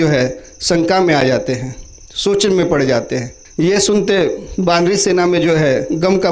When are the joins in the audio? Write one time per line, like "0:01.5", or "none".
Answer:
0:03.4